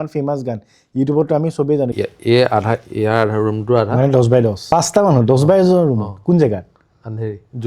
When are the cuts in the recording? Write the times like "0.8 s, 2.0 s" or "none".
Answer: 1.9 s, 4.6 s